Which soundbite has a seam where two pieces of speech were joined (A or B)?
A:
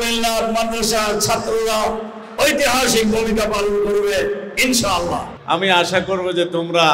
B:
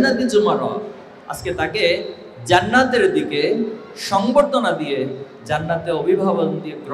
A